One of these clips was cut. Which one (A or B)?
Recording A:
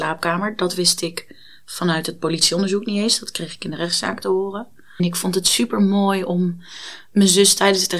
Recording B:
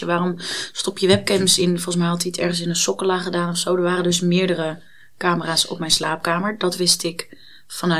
A